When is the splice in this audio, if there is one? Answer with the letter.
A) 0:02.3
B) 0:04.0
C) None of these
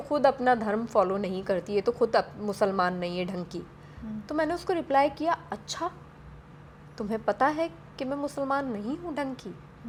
C